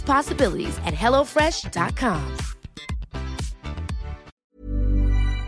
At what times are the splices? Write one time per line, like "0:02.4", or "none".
0:04.3